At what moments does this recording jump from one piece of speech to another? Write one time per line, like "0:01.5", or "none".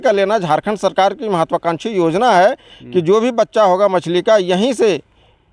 none